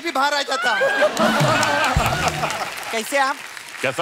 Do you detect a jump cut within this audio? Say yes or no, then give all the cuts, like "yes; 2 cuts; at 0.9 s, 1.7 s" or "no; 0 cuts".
yes; 1 cut; at 2.7 s